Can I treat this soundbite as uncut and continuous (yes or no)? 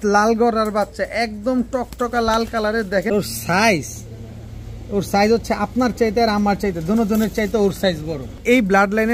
no